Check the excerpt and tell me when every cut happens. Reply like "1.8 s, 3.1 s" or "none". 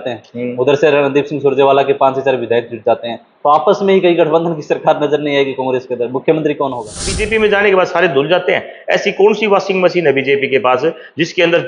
7.2 s